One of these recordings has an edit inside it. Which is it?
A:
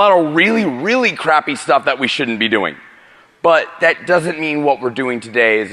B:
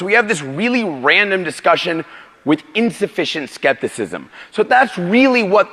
B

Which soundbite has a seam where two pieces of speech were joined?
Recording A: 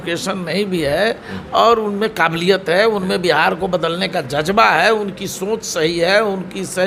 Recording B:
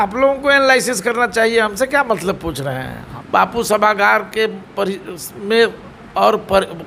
B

